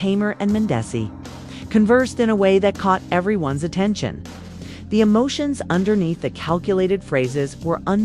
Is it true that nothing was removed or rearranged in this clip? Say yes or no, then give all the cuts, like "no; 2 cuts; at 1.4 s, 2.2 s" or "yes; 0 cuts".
no; 3 cuts; at 0.9 s, 2.6 s, 3.7 s